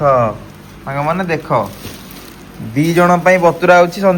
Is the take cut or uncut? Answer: uncut